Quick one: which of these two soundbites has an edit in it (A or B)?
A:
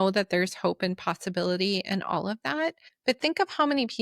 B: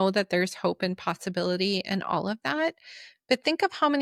A